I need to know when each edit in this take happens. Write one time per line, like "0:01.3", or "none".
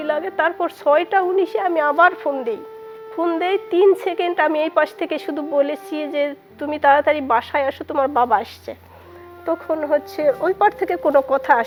none